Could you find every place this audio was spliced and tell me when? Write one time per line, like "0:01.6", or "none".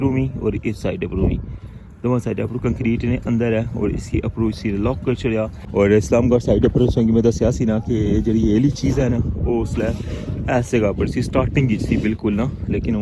0:05.6